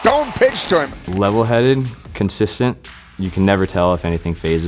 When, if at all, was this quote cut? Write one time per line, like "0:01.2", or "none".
0:01.0